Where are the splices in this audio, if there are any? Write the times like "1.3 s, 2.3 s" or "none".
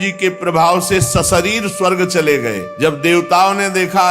2.7 s